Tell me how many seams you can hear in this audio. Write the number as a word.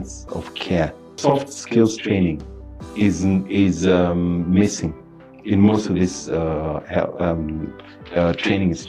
one